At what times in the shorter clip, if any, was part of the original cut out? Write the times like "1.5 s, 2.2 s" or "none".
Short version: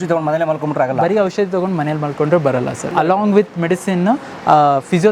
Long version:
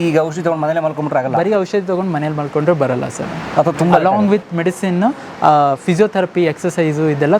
3.0 s